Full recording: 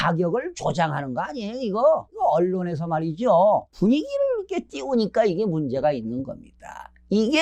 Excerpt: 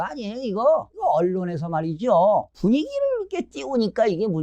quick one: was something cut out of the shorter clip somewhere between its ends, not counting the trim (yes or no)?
no